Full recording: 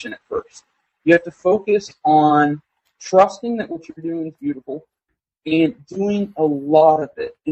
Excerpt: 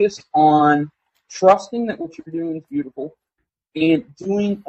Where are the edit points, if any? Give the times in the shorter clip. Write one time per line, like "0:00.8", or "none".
none